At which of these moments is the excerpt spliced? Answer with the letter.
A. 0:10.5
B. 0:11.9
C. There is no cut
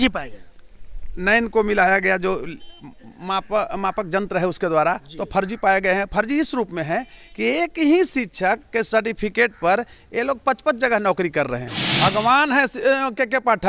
B